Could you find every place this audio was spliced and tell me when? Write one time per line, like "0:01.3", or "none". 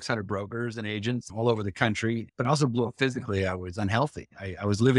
0:01.3
0:02.3